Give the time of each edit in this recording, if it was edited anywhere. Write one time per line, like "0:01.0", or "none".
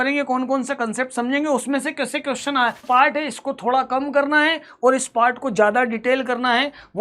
0:02.8